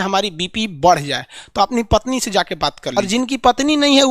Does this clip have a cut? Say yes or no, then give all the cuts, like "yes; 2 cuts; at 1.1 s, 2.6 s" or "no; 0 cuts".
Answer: yes; 1 cut; at 3.0 s